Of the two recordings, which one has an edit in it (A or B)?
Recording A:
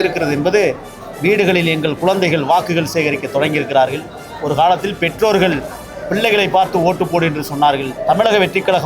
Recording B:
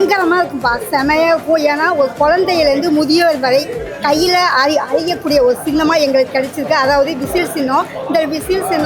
A